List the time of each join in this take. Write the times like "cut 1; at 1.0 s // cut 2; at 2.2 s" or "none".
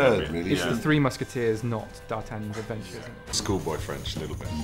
cut 1; at 3.3 s